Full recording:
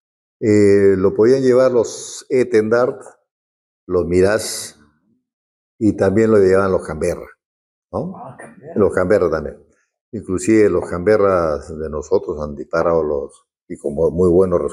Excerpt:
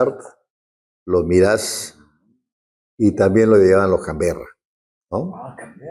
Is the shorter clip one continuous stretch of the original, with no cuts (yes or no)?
yes